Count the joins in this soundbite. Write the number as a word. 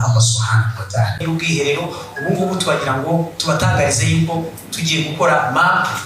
one